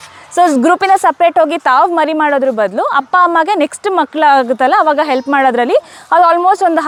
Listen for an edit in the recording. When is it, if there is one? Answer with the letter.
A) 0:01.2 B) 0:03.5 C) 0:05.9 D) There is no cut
D